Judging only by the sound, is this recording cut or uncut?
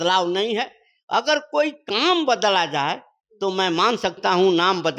uncut